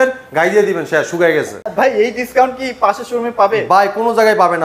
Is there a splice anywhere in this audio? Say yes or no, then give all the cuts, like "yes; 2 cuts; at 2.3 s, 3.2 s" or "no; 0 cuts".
yes; 1 cut; at 1.6 s